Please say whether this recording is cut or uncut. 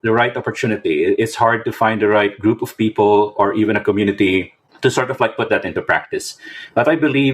cut